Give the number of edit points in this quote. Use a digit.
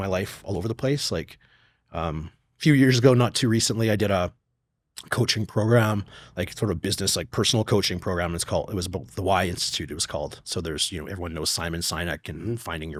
0